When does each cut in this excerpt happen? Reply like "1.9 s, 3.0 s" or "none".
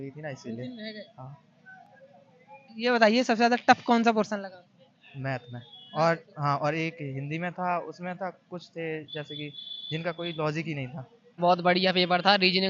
11.4 s

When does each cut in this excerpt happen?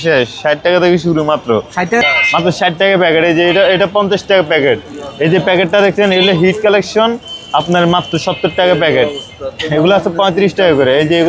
1.9 s

